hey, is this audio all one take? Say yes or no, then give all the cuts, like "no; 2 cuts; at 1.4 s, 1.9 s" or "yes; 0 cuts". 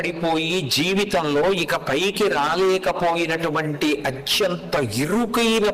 yes; 0 cuts